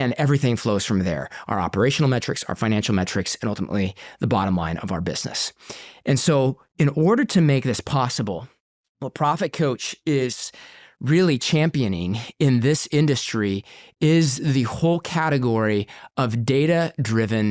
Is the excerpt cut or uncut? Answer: uncut